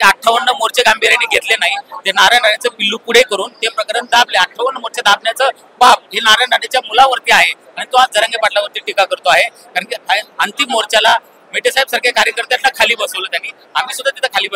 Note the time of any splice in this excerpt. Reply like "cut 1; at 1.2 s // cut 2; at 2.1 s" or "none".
none